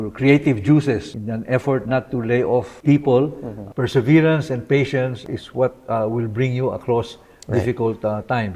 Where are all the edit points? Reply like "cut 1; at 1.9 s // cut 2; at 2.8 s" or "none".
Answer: cut 1; at 1.1 s // cut 2; at 2.7 s // cut 3; at 3.6 s // cut 4; at 5.2 s